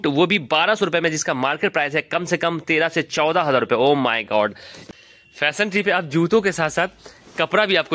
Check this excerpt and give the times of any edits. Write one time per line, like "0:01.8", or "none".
0:04.8